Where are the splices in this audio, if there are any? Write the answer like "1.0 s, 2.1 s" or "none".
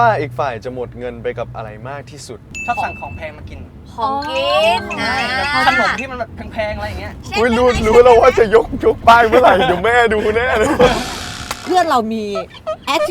2.4 s, 11.6 s